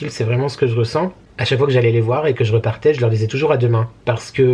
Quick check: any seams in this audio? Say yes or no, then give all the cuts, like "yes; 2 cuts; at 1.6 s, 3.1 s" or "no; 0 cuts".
yes; 1 cut; at 1.2 s